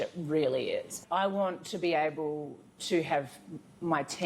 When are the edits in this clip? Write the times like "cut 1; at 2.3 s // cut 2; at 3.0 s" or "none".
cut 1; at 1.0 s